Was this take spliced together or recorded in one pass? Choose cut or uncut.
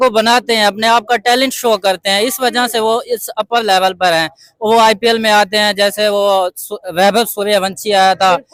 uncut